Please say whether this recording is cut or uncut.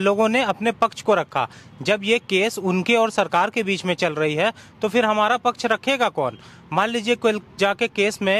uncut